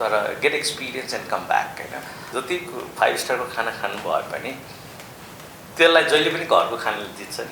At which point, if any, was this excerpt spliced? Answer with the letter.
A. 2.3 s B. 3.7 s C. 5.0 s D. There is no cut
A